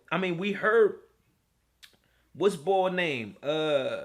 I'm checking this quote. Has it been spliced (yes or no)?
no